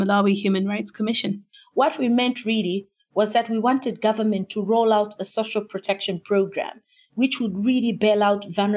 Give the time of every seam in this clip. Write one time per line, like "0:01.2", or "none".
0:01.4